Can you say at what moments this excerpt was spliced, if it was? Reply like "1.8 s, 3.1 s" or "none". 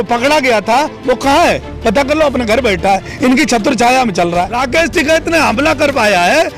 4.6 s